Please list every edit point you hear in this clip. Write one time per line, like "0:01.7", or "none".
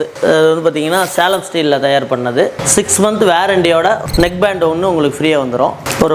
none